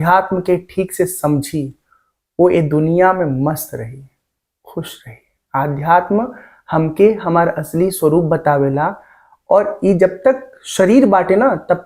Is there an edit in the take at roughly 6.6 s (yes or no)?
no